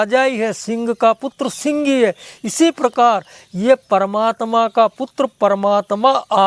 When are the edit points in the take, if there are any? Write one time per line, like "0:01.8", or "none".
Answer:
none